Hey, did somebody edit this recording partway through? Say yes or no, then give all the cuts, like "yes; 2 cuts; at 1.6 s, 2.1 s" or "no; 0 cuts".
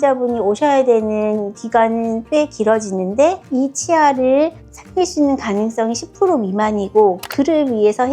yes; 1 cut; at 3.4 s